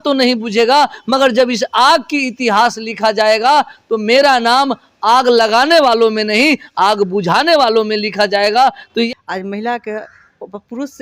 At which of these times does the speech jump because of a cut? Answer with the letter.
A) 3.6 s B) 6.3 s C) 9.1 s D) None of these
C